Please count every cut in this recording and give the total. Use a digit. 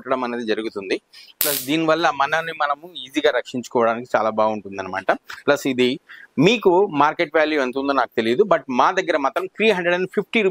0